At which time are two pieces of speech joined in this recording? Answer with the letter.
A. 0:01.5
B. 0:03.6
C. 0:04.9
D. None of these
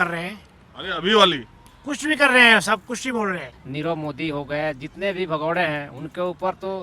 B